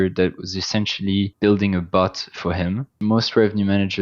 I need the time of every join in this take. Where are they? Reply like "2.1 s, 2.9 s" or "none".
1.3 s, 2.9 s